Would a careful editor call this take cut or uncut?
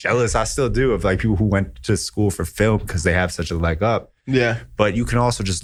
uncut